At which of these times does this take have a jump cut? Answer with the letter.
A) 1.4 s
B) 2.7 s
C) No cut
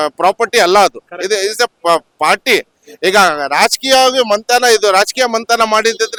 C